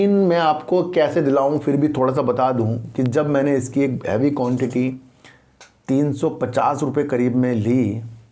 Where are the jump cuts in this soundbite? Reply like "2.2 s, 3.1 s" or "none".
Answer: none